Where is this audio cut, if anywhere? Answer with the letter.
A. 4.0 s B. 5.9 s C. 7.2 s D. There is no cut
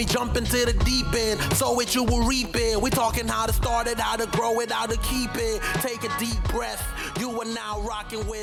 D